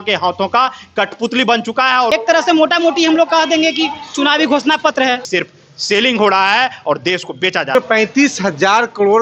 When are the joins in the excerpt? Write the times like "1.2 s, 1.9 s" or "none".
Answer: 2.1 s, 5.2 s, 7.8 s